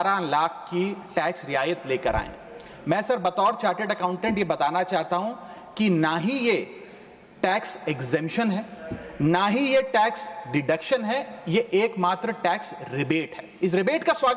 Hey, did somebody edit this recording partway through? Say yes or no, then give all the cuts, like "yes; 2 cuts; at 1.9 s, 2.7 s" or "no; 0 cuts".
no; 0 cuts